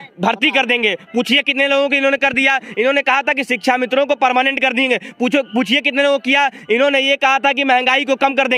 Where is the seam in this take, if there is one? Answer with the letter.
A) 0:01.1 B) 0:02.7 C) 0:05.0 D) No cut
D